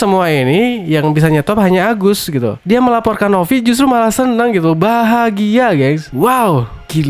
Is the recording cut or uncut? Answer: cut